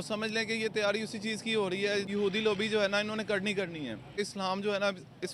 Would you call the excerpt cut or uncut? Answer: cut